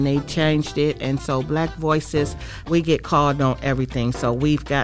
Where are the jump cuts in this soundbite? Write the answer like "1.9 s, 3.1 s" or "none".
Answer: 2.5 s